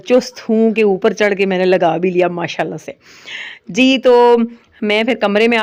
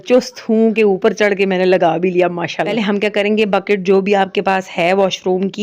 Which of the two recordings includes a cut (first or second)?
second